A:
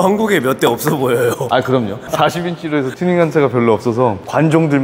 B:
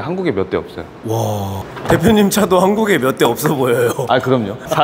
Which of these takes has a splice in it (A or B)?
B